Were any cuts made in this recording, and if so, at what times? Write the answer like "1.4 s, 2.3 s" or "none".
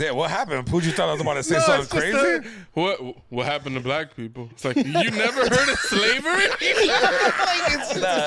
none

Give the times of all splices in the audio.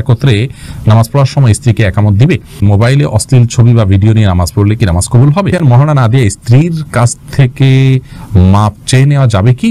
2.6 s, 5.5 s

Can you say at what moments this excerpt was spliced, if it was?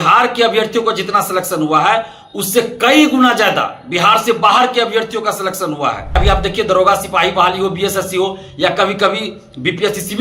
6.2 s

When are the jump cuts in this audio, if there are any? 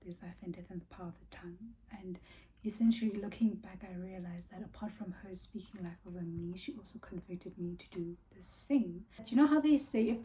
9.2 s

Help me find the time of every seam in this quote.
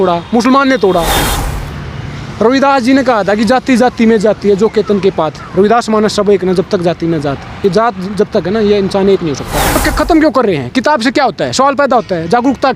1.2 s, 9.7 s

